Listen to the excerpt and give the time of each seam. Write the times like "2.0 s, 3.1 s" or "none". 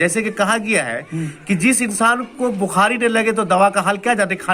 none